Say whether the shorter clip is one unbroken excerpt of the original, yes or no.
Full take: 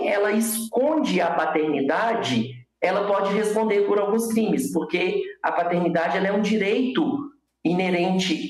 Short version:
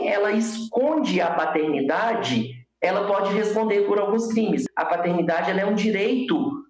no